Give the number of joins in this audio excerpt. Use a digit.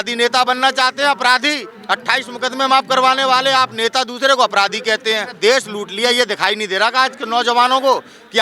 1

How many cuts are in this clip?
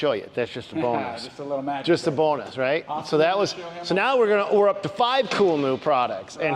0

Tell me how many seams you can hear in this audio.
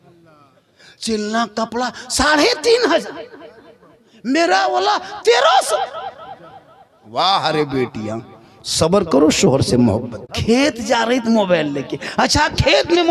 1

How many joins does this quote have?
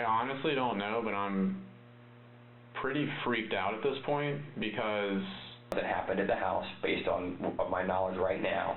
1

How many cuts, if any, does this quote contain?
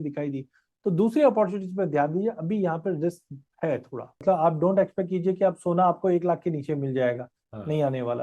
1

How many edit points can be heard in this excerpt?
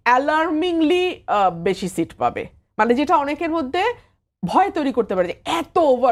0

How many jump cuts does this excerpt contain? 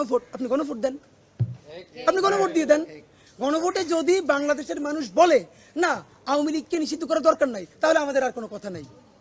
0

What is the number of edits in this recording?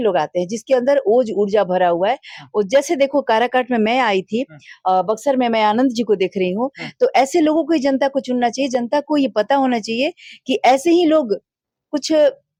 0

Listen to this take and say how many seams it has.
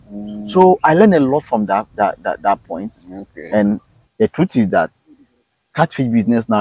1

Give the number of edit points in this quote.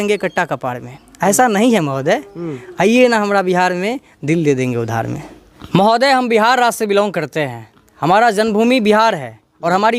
1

